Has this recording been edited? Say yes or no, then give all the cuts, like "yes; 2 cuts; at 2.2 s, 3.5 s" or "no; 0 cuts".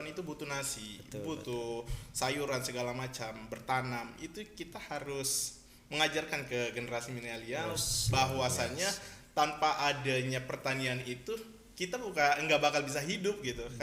no; 0 cuts